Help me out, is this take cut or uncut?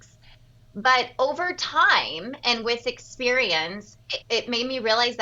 cut